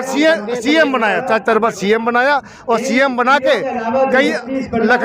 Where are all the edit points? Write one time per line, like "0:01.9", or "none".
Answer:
0:01.2